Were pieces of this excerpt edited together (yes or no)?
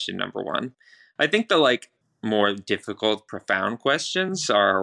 yes